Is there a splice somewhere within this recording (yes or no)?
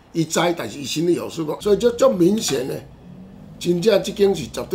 yes